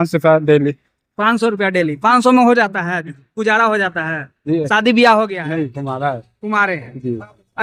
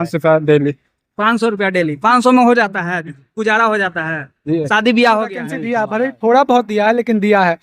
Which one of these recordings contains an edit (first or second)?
second